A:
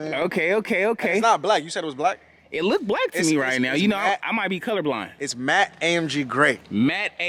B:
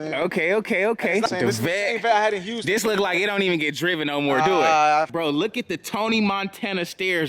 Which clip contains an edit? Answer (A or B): B